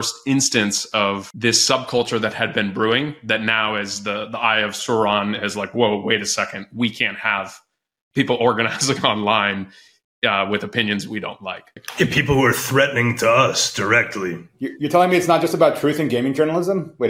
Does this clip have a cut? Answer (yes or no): yes